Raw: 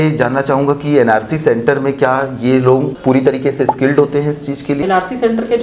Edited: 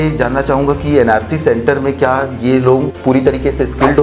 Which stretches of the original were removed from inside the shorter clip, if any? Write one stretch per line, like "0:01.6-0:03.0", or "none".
none